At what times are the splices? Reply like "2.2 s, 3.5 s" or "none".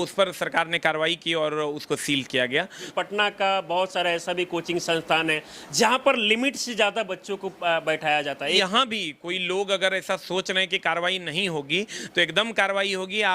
2.9 s, 8.6 s